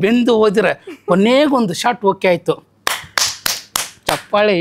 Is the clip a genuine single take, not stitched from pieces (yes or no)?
yes